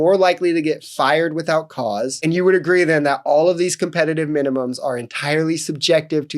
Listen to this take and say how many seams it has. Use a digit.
1